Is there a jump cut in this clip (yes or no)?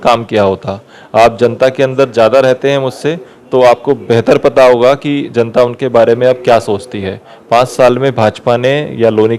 no